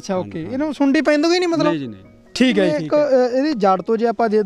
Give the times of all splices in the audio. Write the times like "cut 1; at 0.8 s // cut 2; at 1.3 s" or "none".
cut 1; at 2.8 s